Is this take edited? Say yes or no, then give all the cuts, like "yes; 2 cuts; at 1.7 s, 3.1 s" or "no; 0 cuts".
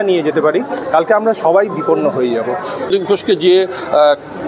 yes; 1 cut; at 2.9 s